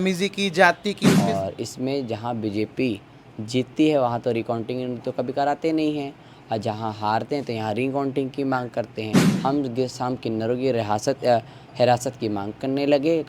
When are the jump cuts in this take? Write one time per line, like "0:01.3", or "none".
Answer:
0:01.2
0:09.2